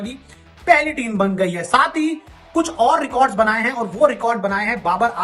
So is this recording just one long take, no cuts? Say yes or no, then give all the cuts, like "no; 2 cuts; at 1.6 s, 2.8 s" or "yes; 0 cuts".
yes; 0 cuts